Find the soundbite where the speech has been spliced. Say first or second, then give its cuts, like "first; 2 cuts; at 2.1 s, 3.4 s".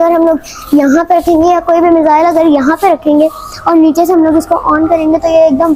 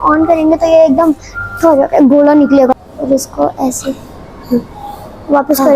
second; 1 cut; at 2.7 s